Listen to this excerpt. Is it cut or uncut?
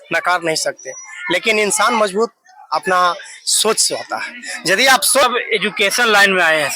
cut